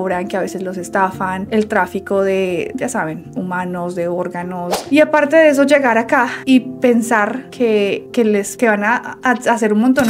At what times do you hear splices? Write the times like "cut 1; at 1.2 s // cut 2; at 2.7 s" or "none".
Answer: cut 1; at 4.8 s